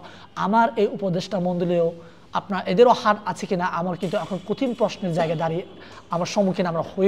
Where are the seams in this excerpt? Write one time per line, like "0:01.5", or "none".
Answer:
none